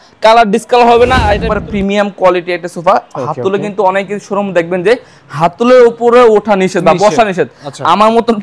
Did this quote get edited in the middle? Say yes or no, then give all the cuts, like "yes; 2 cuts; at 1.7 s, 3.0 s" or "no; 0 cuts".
yes; 1 cut; at 1.4 s